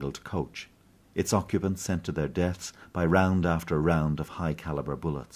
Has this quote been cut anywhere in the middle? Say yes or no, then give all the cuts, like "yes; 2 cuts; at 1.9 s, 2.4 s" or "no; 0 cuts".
yes; 1 cut; at 1.8 s